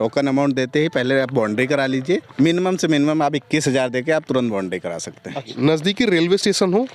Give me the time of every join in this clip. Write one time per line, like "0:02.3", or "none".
0:02.3
0:05.5